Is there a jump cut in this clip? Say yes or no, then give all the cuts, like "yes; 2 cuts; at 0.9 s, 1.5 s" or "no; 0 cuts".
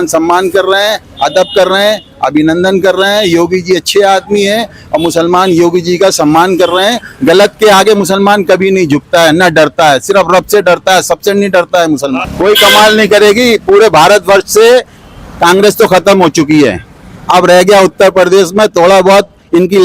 yes; 1 cut; at 12.2 s